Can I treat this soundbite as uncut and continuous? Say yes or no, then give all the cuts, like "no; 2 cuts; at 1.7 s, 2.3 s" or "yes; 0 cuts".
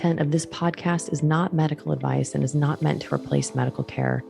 yes; 0 cuts